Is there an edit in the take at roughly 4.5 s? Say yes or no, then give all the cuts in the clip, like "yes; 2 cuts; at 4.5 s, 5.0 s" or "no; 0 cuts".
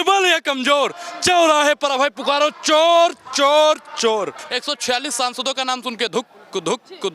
yes; 1 cut; at 4.5 s